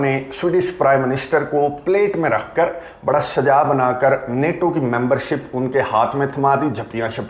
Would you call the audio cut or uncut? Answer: uncut